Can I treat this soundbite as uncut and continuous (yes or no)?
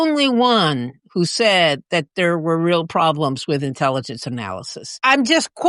yes